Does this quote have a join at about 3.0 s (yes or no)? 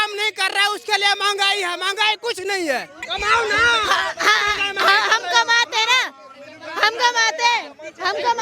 yes